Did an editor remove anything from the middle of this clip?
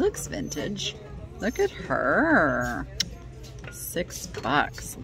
no; 0 cuts

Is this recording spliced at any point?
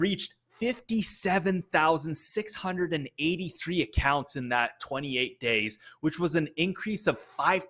no; 0 cuts

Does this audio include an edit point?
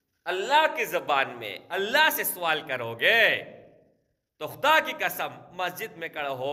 no; 0 cuts

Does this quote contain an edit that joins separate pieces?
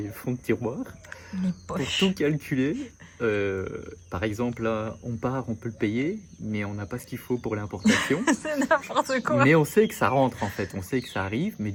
no; 0 cuts

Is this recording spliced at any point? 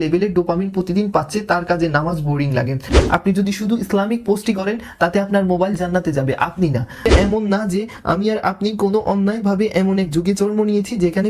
yes; 2 cuts; at 2.9 s, 7.0 s

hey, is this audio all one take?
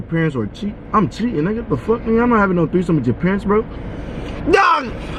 yes; 0 cuts

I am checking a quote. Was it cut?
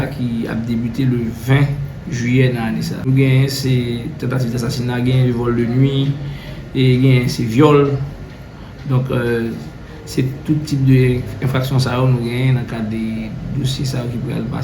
yes; 1 cut; at 3.0 s

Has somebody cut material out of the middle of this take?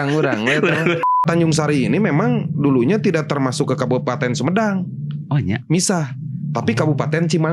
yes; 1 cut; at 1.2 s

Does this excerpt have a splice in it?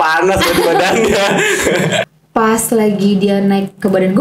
yes; 1 cut; at 2.0 s

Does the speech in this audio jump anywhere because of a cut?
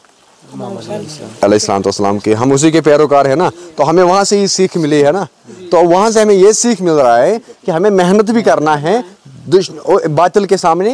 no; 0 cuts

